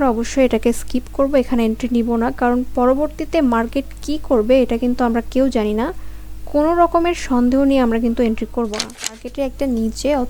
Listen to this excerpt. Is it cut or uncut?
cut